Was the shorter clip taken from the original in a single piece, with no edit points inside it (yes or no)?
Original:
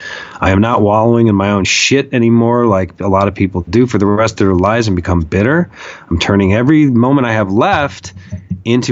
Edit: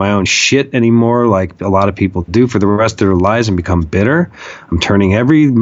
yes